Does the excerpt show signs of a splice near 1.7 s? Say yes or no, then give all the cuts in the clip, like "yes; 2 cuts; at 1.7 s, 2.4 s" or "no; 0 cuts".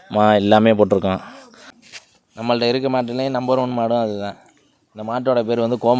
yes; 1 cut; at 1.7 s